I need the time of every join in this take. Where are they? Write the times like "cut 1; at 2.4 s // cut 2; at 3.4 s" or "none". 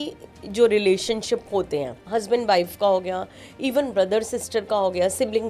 cut 1; at 2.1 s